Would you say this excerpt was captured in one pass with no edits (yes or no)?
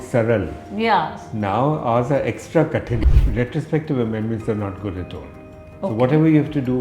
no